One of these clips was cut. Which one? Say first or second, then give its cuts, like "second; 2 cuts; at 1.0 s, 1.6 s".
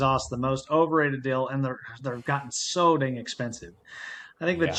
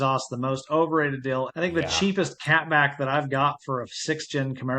second; 1 cut; at 1.5 s